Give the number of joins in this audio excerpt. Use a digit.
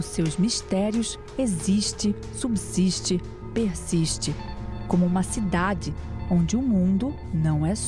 1